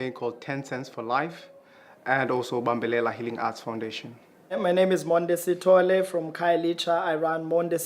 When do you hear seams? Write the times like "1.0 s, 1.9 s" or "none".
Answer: 2.6 s